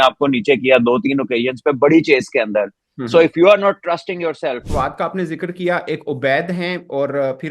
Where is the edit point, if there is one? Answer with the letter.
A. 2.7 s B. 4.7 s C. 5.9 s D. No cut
B